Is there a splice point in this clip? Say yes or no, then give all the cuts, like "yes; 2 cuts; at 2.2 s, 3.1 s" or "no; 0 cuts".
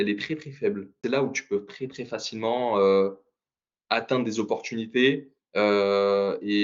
yes; 1 cut; at 1.0 s